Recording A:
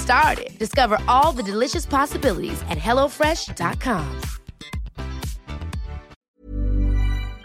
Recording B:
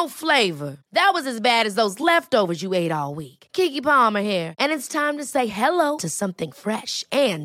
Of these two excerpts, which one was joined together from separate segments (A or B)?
A